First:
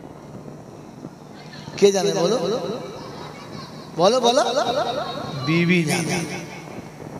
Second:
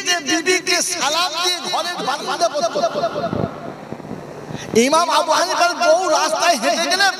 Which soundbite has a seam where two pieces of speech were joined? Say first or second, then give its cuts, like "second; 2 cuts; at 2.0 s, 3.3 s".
second; 1 cut; at 2.0 s